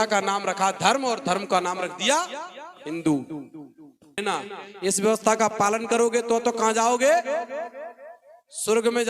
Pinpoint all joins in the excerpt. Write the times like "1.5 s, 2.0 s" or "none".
4.2 s